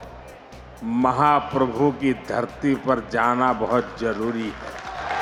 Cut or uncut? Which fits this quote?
uncut